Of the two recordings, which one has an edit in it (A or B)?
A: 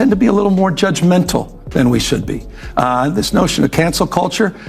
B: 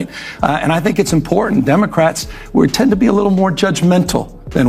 A